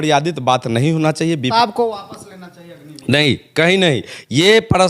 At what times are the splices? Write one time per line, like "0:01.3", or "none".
0:01.5